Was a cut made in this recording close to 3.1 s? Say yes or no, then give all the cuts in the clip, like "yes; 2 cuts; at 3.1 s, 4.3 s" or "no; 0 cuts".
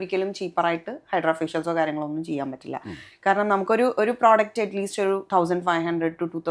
no; 0 cuts